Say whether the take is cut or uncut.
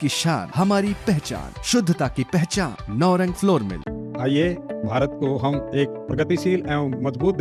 uncut